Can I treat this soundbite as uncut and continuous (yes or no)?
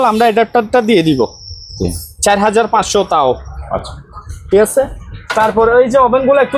yes